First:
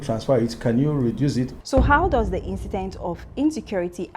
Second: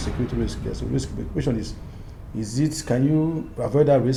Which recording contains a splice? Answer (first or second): first